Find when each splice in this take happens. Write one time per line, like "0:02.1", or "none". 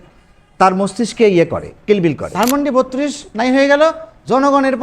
0:02.3